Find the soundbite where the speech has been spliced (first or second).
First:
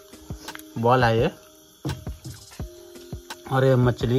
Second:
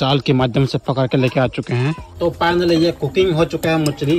second